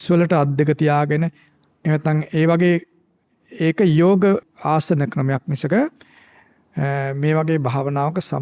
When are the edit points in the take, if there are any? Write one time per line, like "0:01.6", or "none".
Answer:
0:04.5

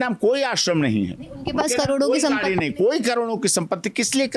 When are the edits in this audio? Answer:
none

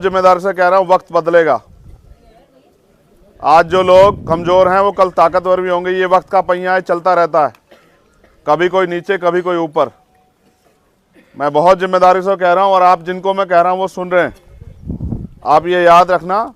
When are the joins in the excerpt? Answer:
none

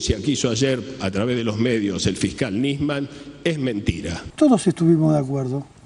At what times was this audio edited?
0:04.2

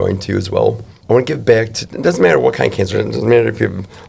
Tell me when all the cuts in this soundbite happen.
0:00.9

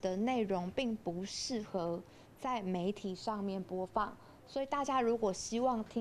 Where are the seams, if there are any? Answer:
none

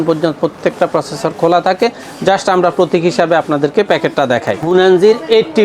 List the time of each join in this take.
0:04.6

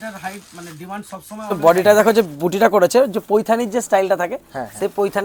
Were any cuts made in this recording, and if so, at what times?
0:01.5

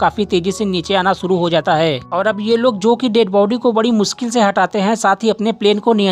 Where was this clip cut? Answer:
none

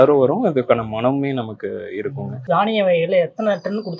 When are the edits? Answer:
0:02.4

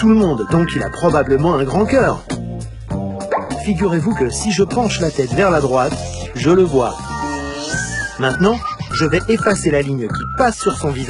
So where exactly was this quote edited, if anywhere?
0:07.3

